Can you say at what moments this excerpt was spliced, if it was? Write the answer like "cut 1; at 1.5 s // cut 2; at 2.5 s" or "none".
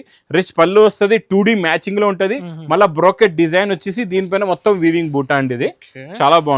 none